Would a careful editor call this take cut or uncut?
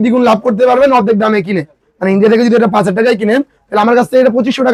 uncut